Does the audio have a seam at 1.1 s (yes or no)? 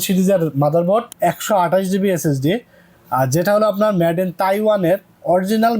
yes